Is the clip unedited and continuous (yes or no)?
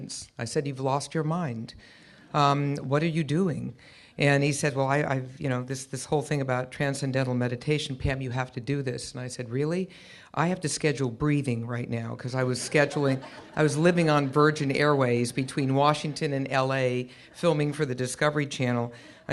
yes